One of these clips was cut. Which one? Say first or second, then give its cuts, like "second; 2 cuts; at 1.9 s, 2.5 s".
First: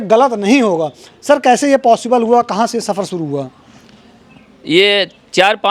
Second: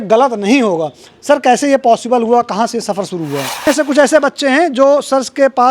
second; 1 cut; at 3.7 s